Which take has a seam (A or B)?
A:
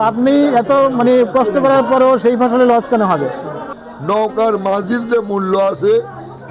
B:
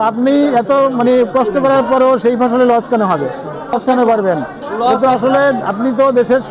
A